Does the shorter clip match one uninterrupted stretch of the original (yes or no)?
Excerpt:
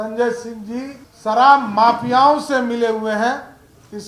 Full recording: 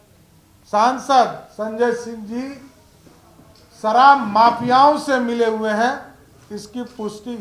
no